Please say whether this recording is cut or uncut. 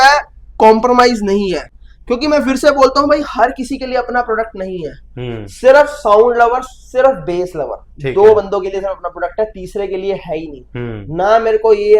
uncut